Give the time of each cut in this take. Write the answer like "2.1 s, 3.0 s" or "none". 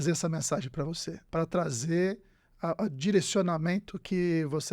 1.1 s